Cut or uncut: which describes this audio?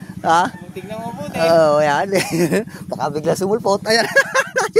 uncut